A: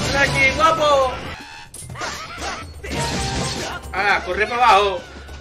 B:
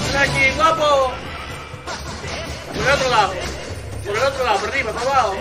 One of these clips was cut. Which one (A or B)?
A